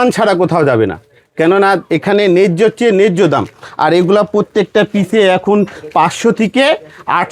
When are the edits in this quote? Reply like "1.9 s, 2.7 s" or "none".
none